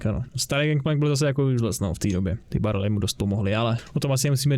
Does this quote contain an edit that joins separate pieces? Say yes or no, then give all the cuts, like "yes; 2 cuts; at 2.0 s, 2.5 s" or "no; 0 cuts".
no; 0 cuts